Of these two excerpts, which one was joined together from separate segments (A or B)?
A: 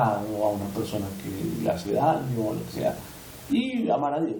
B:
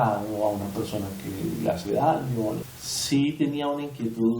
B